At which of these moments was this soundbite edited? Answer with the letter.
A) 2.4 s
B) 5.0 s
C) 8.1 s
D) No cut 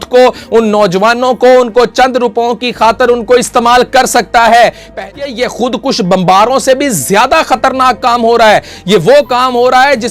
B